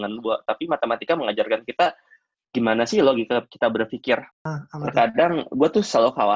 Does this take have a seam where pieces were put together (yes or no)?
yes